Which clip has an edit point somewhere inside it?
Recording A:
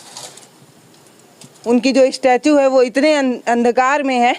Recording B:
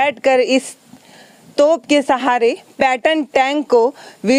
A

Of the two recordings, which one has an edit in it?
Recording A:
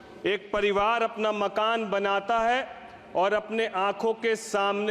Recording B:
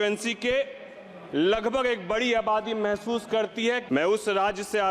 B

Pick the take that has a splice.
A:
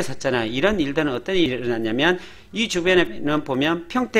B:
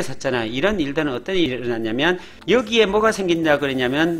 B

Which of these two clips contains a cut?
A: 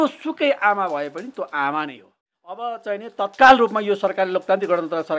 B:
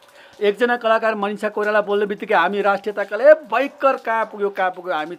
A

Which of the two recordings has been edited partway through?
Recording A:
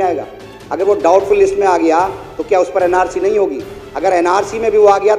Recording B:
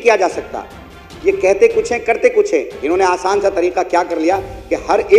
B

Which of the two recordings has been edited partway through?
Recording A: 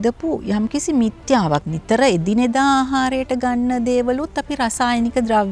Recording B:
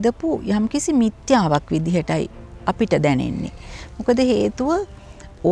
A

